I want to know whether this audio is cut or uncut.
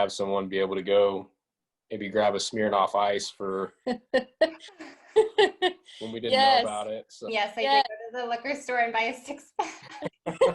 cut